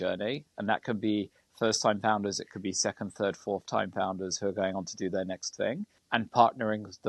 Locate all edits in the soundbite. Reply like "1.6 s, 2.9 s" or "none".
5.9 s